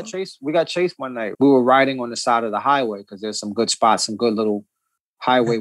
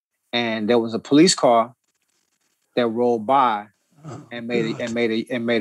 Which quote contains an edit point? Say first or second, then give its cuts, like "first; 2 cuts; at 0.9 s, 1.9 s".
first; 1 cut; at 1.2 s